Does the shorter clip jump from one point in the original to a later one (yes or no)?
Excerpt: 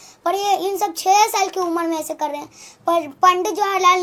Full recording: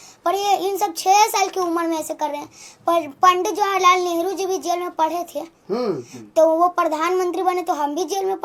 no